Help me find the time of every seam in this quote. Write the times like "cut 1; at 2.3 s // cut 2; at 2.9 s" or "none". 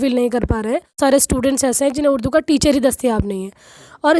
cut 1; at 1.0 s